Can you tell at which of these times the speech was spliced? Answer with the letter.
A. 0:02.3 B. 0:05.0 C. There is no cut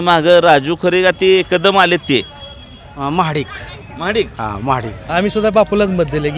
B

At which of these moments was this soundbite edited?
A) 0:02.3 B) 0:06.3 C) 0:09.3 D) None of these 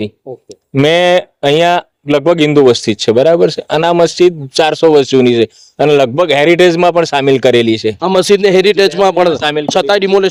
D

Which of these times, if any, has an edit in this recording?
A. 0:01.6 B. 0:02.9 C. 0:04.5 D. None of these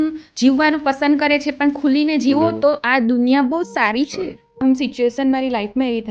C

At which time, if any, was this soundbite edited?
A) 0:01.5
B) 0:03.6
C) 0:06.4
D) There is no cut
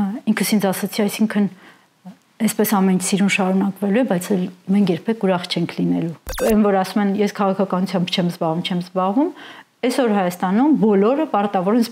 C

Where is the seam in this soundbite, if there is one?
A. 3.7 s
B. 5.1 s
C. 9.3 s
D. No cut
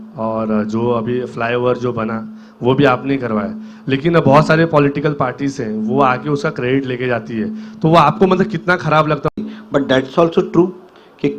C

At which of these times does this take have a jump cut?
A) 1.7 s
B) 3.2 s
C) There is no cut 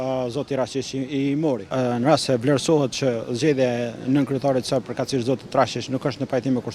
A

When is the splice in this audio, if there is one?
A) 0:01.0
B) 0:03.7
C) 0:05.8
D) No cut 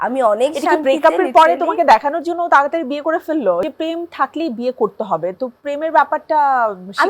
B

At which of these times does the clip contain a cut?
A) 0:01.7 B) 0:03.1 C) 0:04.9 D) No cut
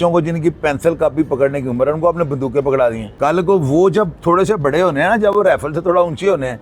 B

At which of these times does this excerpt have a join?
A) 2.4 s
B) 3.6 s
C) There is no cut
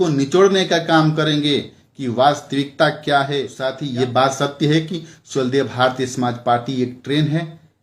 B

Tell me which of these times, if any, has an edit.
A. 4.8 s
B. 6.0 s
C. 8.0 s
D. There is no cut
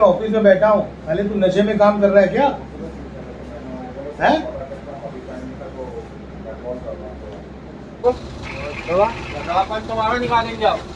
C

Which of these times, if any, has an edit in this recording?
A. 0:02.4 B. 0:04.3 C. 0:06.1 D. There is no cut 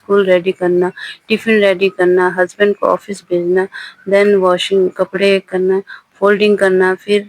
D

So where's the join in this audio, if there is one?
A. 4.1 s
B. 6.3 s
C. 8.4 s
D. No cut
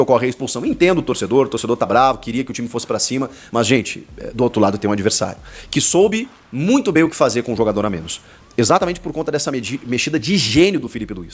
D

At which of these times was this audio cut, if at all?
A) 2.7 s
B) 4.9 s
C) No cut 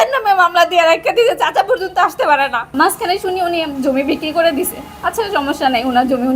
A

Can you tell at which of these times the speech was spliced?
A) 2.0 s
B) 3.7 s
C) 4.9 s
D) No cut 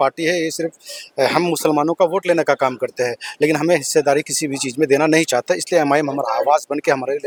D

